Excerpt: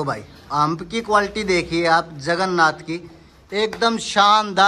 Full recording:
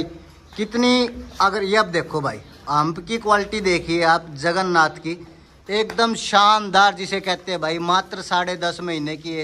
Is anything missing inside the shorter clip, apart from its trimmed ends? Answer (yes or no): no